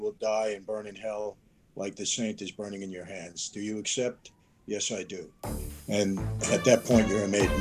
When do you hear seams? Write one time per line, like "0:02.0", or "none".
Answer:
none